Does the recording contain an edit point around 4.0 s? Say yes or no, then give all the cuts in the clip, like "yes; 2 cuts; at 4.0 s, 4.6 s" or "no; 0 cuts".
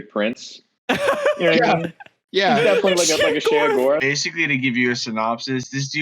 yes; 1 cut; at 4.0 s